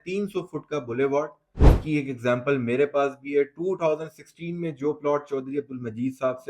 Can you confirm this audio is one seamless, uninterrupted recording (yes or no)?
no